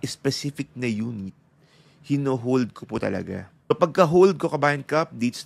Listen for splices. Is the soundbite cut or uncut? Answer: cut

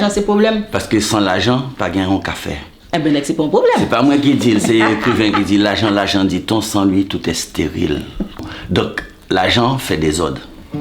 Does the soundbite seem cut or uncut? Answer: cut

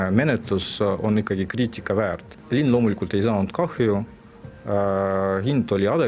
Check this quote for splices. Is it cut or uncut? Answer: cut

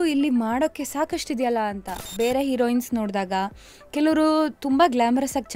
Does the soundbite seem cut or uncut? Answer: cut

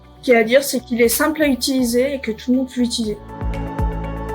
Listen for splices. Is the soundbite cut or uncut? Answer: cut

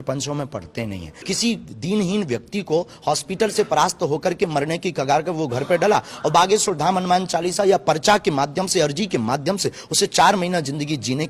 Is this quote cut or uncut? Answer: cut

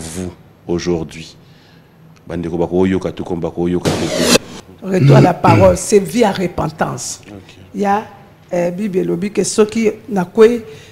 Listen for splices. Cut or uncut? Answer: cut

